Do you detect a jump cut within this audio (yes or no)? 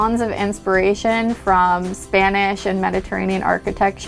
no